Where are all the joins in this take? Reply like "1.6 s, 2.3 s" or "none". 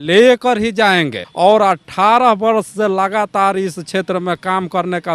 1.2 s